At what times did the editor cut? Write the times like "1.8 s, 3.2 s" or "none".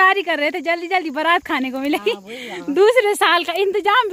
none